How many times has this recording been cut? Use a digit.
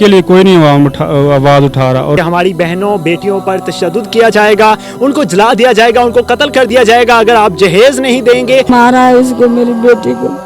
2